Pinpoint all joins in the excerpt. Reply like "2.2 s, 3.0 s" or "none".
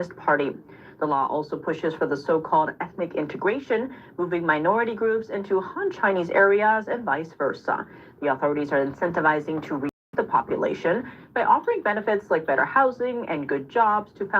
10.1 s